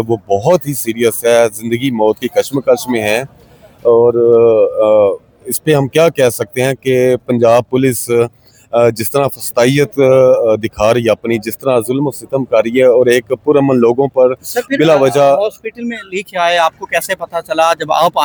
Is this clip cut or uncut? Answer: uncut